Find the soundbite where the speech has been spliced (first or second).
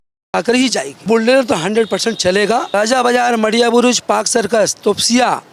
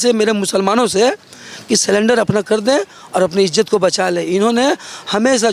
first